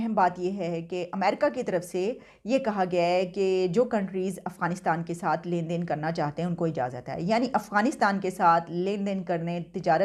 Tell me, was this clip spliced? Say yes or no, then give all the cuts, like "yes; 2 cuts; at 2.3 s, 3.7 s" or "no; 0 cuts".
no; 0 cuts